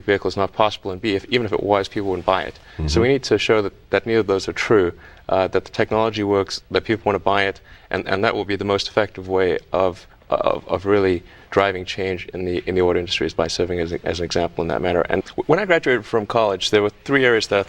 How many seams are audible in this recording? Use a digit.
1